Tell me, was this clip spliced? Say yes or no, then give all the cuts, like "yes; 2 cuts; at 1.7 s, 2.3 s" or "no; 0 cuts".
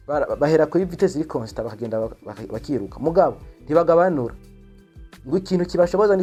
no; 0 cuts